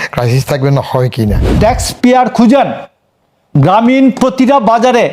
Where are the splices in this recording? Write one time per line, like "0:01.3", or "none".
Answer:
0:01.4